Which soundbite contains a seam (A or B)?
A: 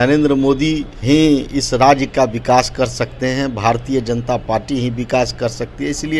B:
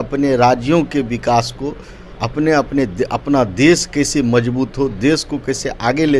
A